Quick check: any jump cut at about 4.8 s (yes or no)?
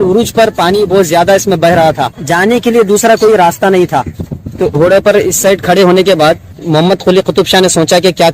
yes